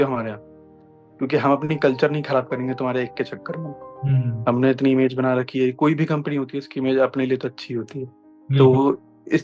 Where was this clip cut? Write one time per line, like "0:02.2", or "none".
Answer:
none